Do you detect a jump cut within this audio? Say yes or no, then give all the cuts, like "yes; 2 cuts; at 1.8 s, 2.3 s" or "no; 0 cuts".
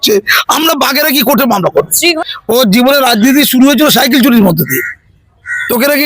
yes; 1 cut; at 2.2 s